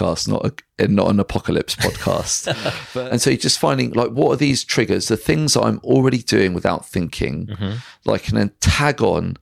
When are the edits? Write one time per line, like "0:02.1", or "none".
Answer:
0:02.8

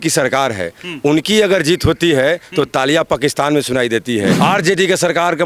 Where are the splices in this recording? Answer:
0:04.4

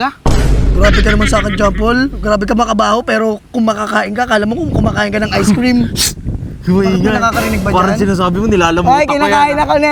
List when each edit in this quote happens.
none

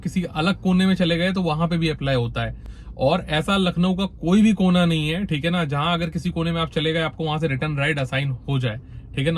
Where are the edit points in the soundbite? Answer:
none

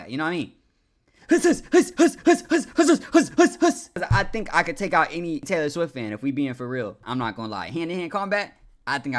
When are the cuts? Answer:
0:04.0
0:05.4
0:07.0

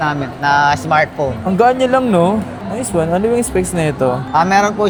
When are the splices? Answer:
none

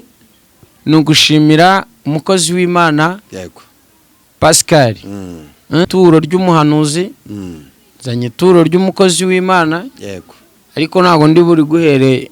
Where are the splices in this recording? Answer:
0:05.9

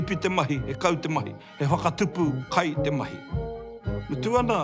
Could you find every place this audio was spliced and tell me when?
0:01.4
0:03.7

